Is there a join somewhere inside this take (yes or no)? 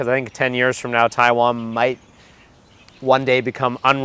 no